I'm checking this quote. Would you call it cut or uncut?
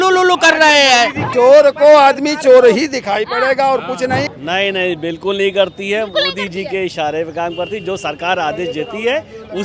cut